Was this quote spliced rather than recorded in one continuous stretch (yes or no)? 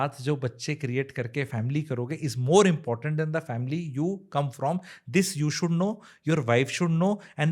no